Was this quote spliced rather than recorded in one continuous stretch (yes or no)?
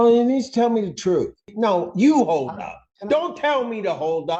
yes